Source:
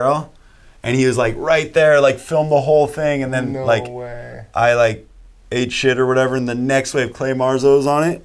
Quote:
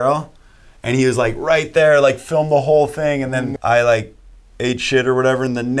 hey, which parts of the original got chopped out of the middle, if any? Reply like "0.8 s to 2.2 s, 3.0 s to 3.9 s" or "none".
3.5 s to 4.5 s